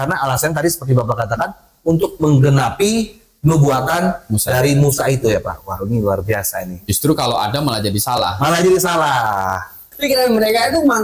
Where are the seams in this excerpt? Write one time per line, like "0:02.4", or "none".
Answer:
0:09.9